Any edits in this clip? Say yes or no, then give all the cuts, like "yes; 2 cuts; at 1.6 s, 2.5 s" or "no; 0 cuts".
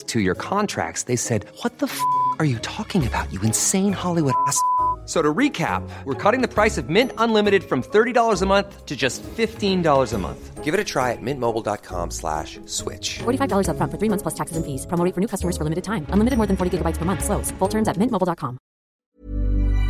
yes; 1 cut; at 19.0 s